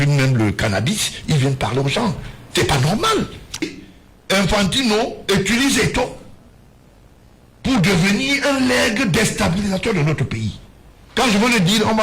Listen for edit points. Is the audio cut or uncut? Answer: cut